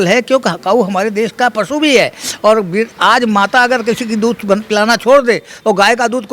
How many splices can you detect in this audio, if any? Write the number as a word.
one